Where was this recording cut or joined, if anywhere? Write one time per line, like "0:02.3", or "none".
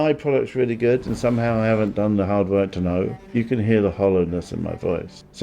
0:03.2